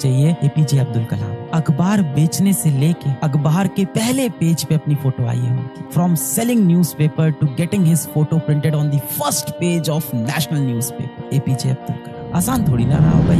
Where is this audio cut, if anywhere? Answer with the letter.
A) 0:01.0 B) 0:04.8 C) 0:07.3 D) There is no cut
D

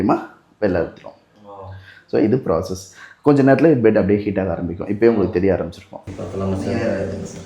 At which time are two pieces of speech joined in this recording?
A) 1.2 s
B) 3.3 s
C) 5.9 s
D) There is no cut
C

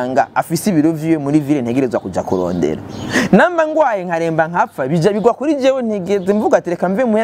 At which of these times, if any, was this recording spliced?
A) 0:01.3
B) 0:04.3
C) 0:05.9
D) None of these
D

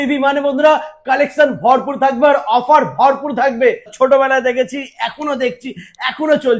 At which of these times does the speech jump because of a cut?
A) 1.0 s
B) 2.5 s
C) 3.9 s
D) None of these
C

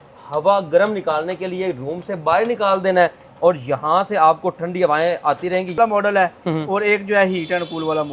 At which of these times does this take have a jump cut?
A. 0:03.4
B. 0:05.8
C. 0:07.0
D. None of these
B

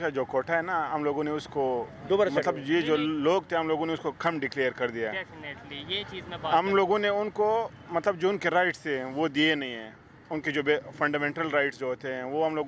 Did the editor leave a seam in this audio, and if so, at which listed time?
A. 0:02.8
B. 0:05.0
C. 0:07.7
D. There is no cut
D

